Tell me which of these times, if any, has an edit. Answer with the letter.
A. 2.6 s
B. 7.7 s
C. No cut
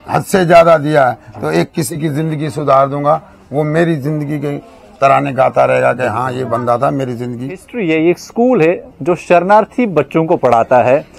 B